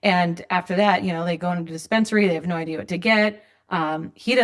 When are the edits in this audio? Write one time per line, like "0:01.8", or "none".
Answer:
none